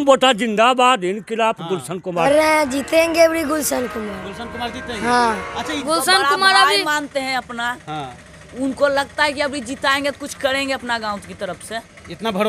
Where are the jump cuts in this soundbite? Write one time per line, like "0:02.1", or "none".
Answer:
0:02.2
0:05.8